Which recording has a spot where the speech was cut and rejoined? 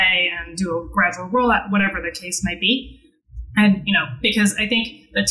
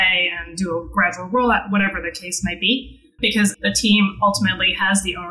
second; 1 cut; at 3.4 s

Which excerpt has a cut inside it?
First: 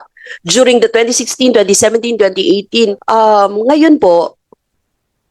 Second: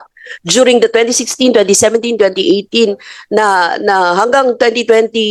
first; 1 cut; at 3.0 s

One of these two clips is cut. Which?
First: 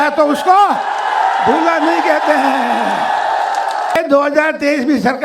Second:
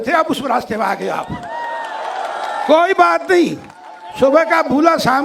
first; 1 cut; at 4.0 s

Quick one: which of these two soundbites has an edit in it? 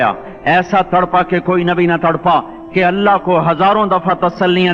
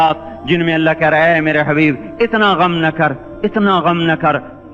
first; 1 cut; at 2.6 s

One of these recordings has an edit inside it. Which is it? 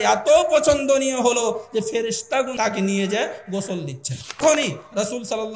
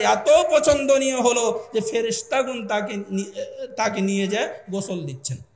first; 2 cuts; at 2.5 s, 4.4 s

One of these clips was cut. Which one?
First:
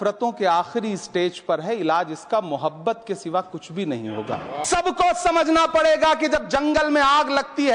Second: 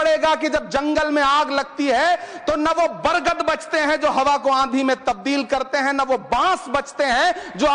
first; 1 cut; at 4.5 s

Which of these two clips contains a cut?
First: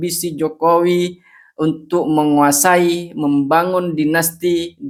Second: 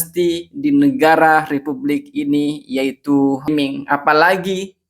second; 1 cut; at 3.5 s

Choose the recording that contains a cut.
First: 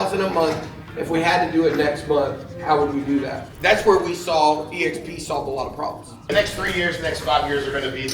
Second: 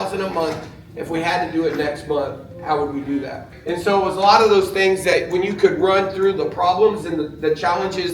first; 2 cuts; at 3.5 s, 6.1 s

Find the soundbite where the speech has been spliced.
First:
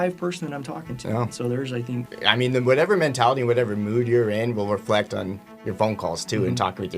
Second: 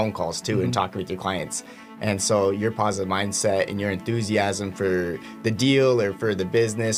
first; 1 cut; at 2.1 s

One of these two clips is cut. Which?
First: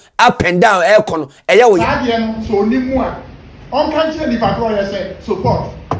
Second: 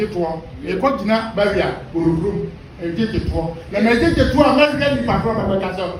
first; 1 cut; at 1.8 s

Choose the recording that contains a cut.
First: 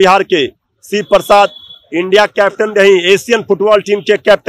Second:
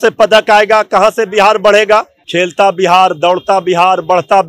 second; 1 cut; at 2.2 s

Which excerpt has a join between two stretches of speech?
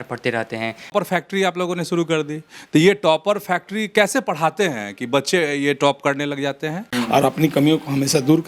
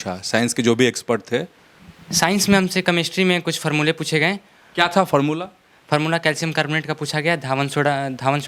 first; 2 cuts; at 0.9 s, 6.8 s

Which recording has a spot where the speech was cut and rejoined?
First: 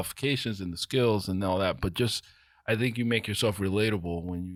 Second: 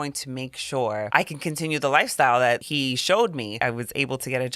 second; 3 cuts; at 1.1 s, 2.6 s, 3.6 s

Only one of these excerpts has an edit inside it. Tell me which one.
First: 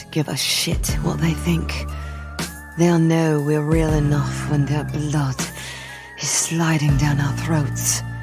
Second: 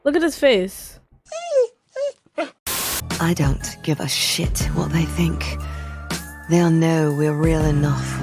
second; 1 cut; at 2.6 s

